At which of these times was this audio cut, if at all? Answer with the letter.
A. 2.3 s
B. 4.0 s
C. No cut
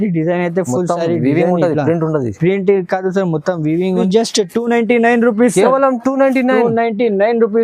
B